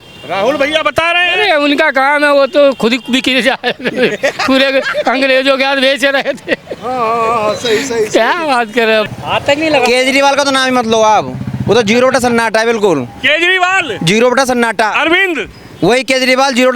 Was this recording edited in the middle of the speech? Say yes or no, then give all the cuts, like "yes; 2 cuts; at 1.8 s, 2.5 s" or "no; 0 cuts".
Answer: yes; 1 cut; at 9.1 s